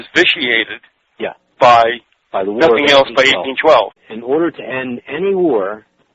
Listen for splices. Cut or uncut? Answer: uncut